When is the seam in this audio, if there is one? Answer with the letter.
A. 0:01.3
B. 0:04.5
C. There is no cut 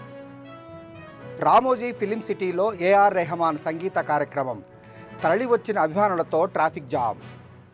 A